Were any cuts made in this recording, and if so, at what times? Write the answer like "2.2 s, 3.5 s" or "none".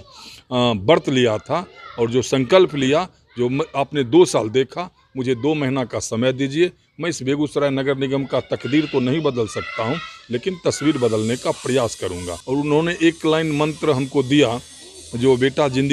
12.3 s